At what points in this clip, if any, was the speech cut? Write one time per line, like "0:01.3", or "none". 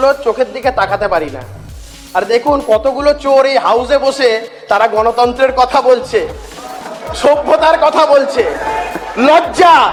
none

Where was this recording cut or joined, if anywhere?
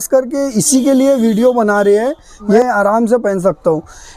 0:02.6

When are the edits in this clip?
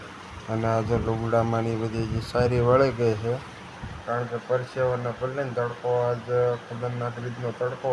none

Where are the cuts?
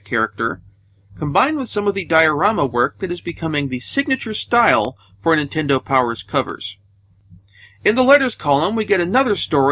none

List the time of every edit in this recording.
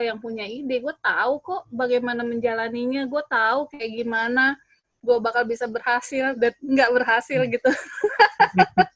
none

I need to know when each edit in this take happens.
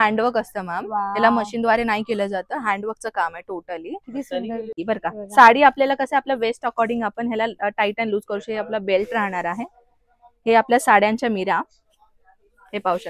0:04.8

